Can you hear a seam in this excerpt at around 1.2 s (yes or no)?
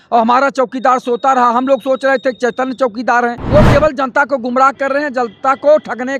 no